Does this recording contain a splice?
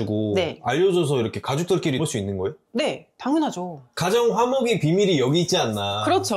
yes; 1 cut; at 3.9 s

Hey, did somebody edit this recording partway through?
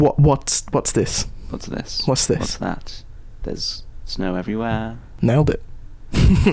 yes; 1 cut; at 5.0 s

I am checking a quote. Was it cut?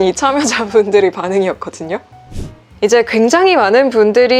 yes; 1 cut; at 2.2 s

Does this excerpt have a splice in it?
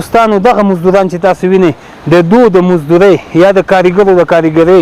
no; 0 cuts

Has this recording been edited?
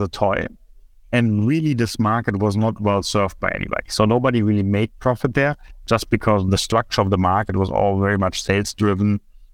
no; 0 cuts

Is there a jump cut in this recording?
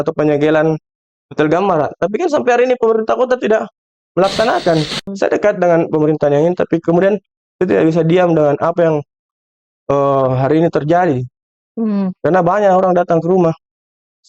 yes; 1 cut; at 5.0 s

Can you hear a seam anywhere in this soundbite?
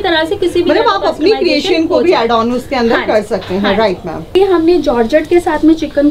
yes; 1 cut; at 4.2 s

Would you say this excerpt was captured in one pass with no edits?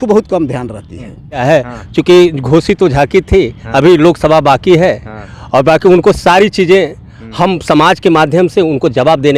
no; 1 cut; at 1.4 s

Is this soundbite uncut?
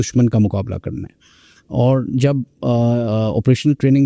yes; 0 cuts

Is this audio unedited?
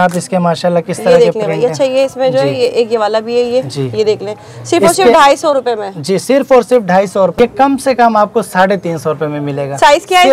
no; 1 cut; at 7.4 s

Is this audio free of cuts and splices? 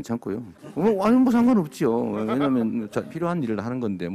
no; 1 cut; at 3.1 s

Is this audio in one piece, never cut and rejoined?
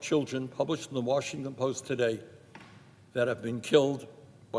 yes; 0 cuts

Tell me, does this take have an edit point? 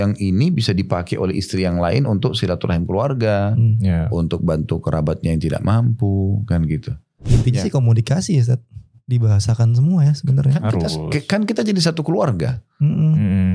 yes; 1 cut; at 7.2 s

